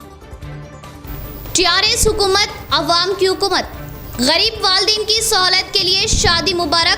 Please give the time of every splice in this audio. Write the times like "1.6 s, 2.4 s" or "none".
1.0 s